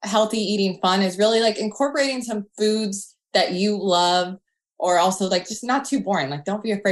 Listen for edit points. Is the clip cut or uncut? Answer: uncut